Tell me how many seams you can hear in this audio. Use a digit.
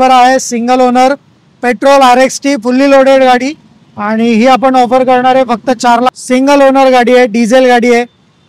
1